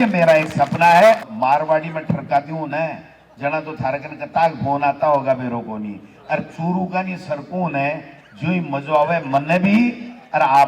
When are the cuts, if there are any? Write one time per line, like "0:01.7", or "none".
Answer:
0:01.3